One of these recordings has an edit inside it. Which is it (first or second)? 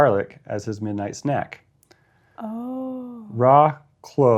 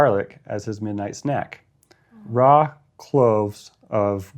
second